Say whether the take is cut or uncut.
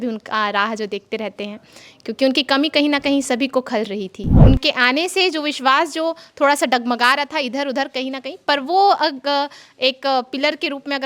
cut